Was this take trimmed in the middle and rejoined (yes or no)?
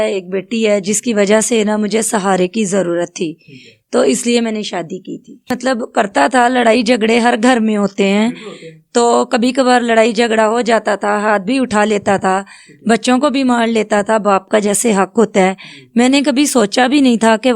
yes